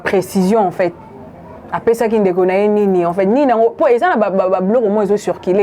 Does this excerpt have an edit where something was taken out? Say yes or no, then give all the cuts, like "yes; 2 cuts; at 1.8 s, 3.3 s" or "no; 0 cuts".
no; 0 cuts